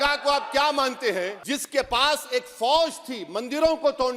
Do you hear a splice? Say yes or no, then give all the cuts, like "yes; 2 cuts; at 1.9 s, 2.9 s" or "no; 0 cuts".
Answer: yes; 1 cut; at 1.4 s